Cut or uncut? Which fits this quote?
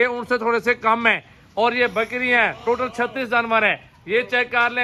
uncut